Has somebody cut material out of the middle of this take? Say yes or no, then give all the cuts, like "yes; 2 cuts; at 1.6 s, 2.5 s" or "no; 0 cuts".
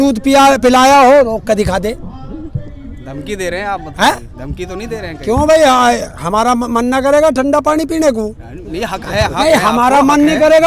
no; 0 cuts